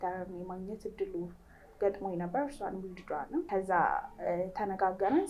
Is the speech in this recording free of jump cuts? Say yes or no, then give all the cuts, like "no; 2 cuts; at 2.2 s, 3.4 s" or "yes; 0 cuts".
no; 1 cut; at 3.5 s